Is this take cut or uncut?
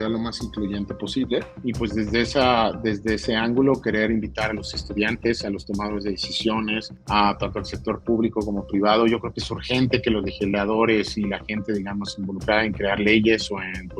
cut